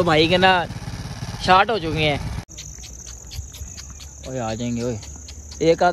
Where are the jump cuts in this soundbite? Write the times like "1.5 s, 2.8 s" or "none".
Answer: 2.4 s